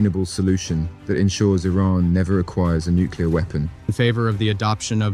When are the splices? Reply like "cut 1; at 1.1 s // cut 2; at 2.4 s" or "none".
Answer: cut 1; at 3.9 s